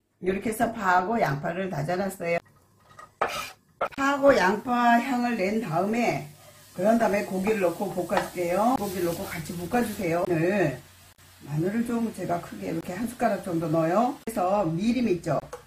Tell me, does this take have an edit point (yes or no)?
yes